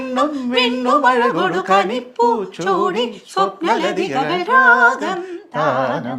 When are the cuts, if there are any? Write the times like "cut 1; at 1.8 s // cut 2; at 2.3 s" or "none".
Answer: none